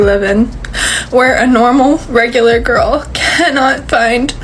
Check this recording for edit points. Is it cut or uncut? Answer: uncut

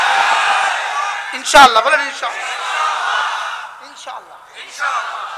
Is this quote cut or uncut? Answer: uncut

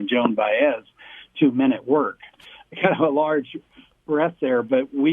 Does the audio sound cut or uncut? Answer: cut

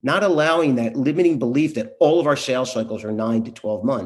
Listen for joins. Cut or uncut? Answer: uncut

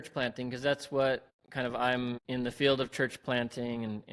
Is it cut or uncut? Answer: cut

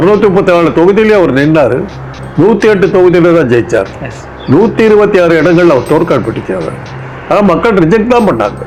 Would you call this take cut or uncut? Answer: uncut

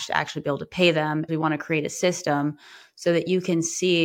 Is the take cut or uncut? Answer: cut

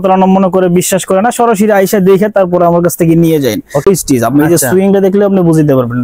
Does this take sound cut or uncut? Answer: cut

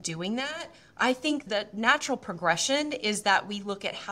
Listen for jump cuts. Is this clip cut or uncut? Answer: cut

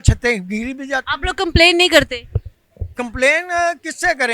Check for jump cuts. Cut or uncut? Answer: uncut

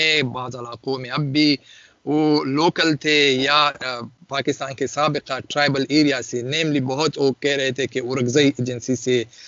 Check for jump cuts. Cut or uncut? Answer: uncut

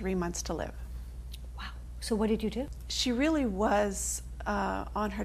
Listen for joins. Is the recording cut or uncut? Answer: uncut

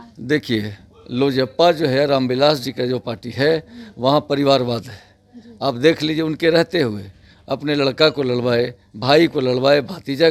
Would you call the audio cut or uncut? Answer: uncut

